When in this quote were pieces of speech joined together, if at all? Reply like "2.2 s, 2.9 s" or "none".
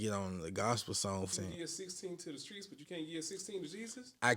1.3 s